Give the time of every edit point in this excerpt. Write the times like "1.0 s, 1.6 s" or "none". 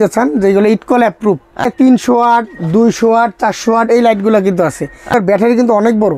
1.7 s, 5.1 s